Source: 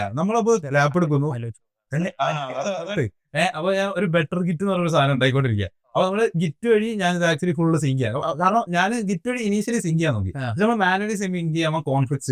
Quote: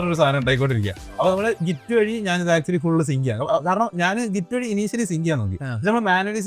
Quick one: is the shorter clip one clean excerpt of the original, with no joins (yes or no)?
yes